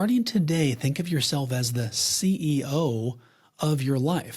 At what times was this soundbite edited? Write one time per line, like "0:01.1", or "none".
none